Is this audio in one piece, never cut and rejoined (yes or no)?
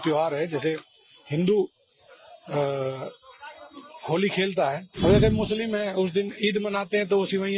no